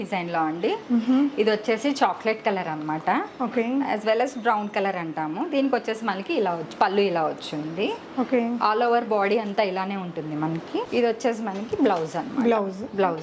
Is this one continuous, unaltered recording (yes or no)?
yes